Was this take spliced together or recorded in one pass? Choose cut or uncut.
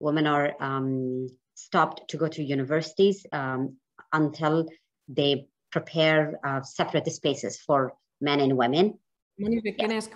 uncut